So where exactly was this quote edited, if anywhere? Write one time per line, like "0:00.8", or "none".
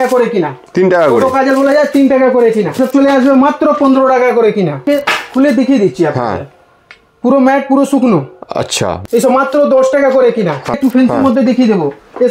0:02.8
0:04.8
0:09.0
0:10.8